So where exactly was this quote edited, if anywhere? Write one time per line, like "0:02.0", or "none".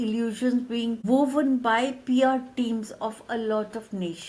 0:01.0

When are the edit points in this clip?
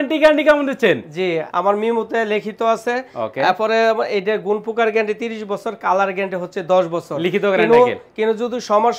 0:01.5

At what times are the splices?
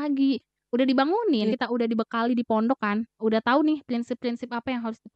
0:01.5

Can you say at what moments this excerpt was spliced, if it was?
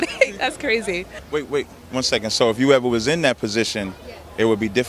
0:01.1

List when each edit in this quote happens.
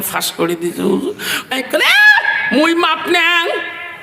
0:01.5

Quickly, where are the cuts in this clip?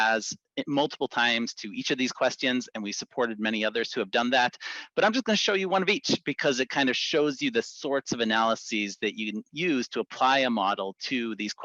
none

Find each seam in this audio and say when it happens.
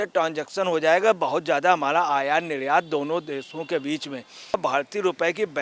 0:04.5

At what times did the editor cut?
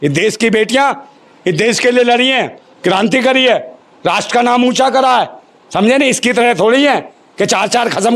none

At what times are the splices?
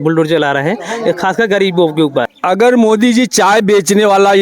0:02.3

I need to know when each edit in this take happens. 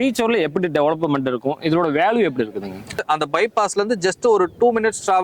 0:03.0

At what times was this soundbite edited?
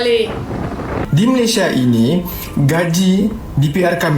0:01.0

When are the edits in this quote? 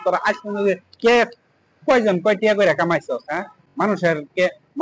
none

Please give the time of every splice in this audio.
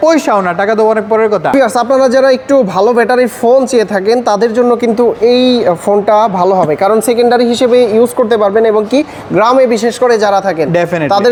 none

